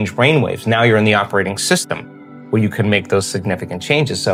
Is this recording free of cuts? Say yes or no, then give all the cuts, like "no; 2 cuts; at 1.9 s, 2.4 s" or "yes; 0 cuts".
yes; 0 cuts